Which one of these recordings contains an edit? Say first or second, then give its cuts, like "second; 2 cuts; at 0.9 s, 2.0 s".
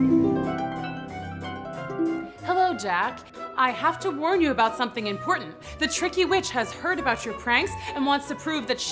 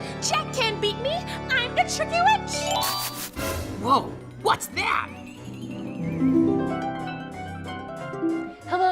second; 1 cut; at 2.9 s